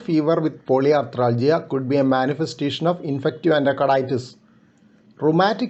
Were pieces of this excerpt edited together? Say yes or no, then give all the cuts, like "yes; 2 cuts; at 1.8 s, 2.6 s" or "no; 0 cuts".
no; 0 cuts